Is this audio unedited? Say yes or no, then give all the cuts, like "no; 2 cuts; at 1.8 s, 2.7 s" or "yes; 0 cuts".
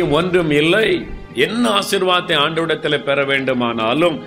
no; 1 cut; at 1.3 s